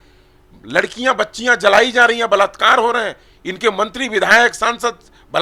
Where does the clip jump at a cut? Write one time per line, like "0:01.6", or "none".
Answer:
none